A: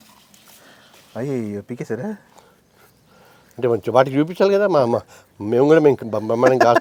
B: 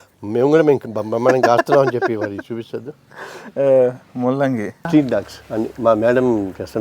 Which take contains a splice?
B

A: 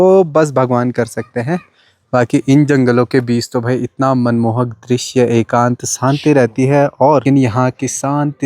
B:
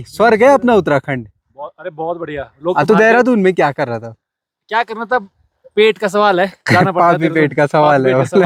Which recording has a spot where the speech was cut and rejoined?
A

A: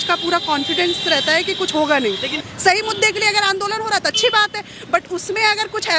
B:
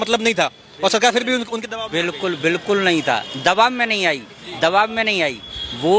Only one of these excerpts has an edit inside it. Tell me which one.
A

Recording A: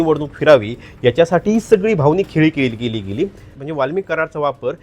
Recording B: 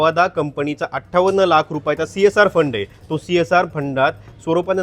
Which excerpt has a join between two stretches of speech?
A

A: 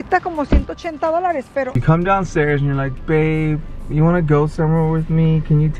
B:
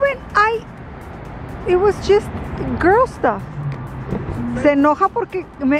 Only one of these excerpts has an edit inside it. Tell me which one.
A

